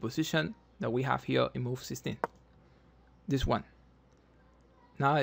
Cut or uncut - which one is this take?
uncut